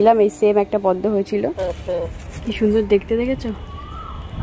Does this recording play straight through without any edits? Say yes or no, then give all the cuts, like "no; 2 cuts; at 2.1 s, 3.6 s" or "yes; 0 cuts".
no; 1 cut; at 1.6 s